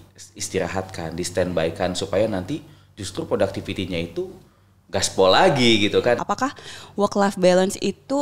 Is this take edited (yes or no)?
yes